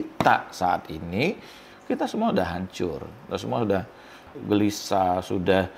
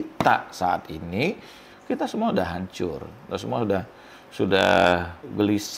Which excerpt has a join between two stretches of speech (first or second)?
first